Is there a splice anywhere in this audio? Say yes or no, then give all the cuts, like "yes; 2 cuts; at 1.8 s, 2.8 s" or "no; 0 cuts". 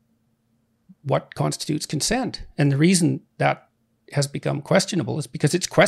no; 0 cuts